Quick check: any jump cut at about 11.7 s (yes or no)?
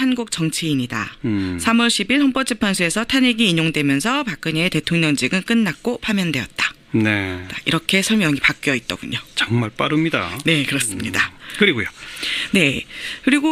no